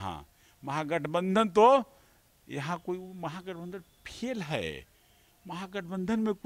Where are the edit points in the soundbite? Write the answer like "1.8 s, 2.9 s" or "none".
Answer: none